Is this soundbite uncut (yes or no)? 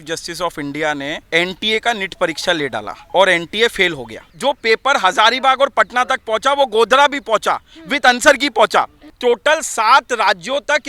no